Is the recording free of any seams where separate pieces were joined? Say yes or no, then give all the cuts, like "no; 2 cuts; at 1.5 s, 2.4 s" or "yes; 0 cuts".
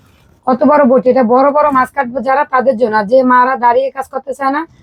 yes; 0 cuts